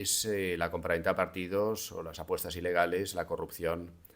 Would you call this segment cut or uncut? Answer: uncut